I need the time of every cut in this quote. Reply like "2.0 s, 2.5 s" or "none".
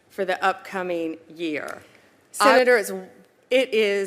2.5 s